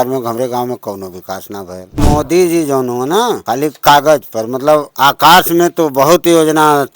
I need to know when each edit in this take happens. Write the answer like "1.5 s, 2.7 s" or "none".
2.0 s, 3.4 s, 4.9 s